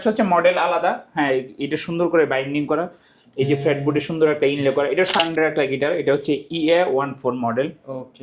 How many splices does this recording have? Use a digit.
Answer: 1